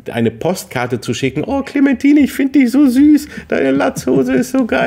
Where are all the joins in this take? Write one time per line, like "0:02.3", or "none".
none